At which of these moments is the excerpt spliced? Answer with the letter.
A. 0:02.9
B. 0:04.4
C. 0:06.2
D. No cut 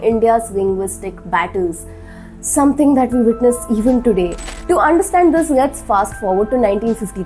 D